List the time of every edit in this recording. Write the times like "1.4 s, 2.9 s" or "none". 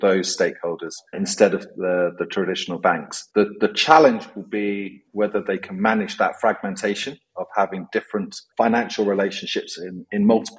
none